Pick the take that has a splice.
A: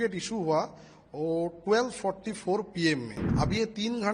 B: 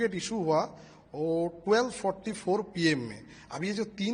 A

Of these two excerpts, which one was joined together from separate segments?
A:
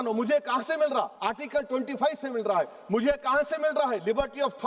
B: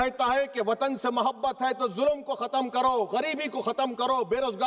A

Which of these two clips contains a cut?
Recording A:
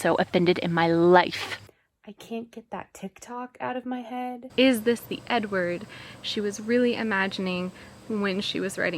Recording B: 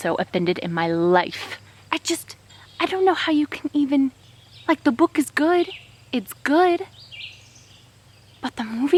A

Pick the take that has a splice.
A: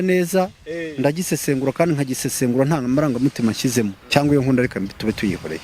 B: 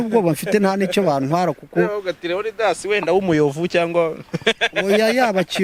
A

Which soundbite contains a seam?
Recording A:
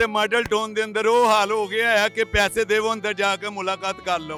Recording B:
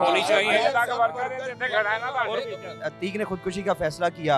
B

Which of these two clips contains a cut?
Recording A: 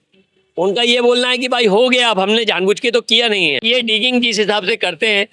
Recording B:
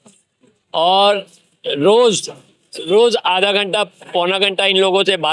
A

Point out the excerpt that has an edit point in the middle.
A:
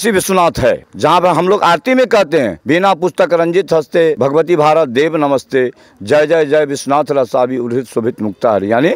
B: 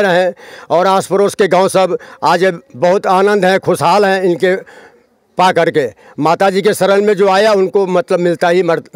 A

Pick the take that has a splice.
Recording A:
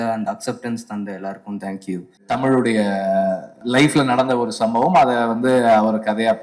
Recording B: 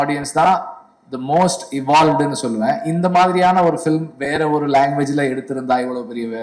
A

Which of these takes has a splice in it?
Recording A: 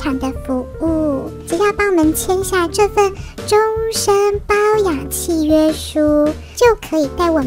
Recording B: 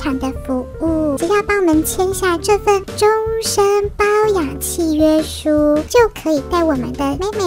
B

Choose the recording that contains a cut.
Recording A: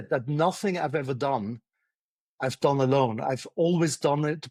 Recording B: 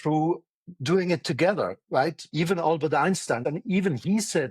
B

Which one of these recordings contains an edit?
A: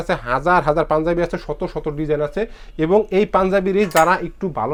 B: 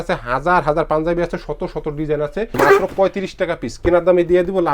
B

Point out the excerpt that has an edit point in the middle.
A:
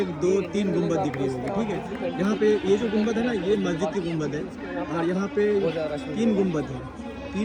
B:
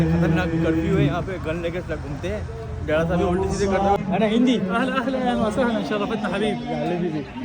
B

